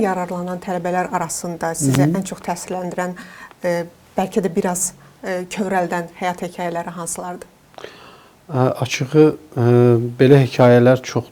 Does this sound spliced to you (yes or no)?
no